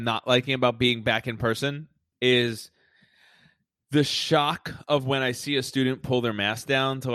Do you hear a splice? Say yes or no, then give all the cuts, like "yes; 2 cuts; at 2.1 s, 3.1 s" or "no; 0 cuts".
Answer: yes; 1 cut; at 2.0 s